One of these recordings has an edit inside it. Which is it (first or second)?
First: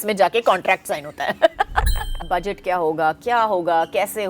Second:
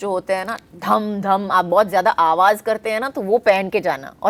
first